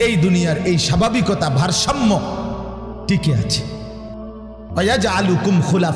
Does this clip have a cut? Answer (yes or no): no